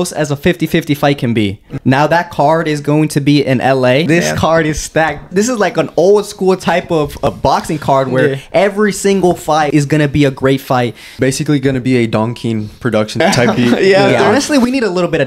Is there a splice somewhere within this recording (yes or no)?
yes